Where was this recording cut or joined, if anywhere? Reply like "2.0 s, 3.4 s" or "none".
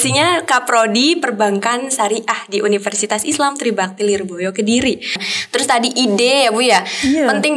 5.3 s